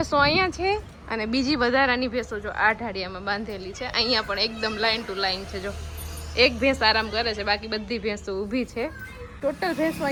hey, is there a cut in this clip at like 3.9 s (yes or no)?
no